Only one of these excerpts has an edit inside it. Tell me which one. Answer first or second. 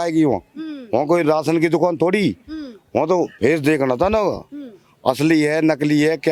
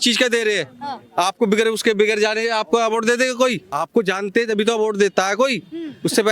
second